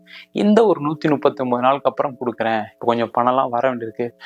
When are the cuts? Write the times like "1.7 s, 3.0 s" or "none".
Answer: none